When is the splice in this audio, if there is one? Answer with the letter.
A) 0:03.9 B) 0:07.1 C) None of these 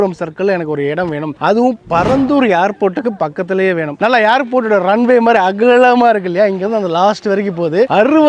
A